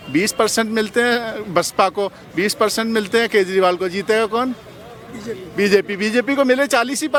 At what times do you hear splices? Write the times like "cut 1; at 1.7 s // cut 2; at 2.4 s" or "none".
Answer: none

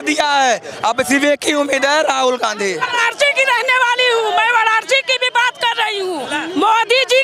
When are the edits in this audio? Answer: cut 1; at 2.9 s // cut 2; at 6.3 s

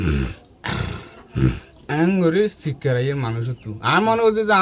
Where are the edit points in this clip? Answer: none

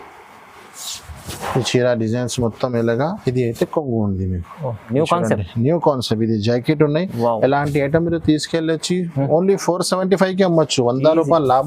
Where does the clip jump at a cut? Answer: cut 1; at 4.9 s

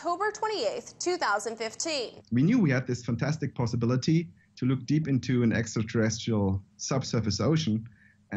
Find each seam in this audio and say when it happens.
cut 1; at 2.4 s

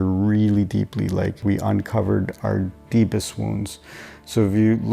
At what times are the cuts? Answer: cut 1; at 1.4 s

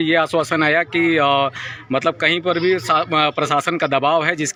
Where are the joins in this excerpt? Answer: none

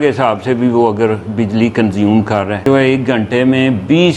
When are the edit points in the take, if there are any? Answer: cut 1; at 2.6 s

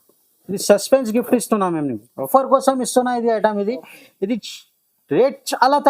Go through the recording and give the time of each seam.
cut 1; at 2.3 s

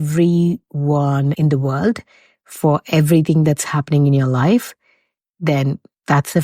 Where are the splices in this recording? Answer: none

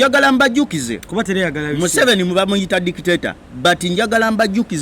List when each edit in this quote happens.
cut 1; at 1.0 s

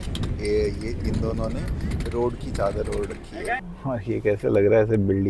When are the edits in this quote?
cut 1; at 3.6 s

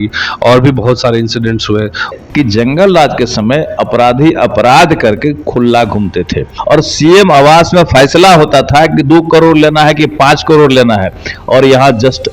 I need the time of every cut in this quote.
cut 1; at 2.1 s // cut 2; at 6.5 s

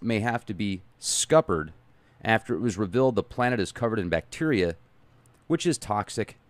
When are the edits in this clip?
none

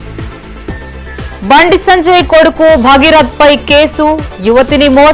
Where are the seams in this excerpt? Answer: cut 1; at 1.0 s

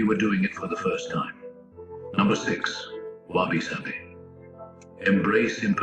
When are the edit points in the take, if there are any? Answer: cut 1; at 2.2 s

